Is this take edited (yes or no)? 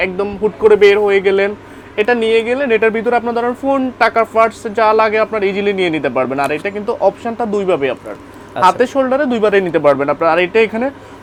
no